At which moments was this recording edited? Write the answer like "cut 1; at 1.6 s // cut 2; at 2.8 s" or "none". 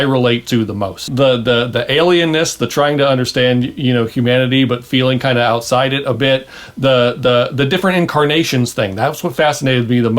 cut 1; at 1.1 s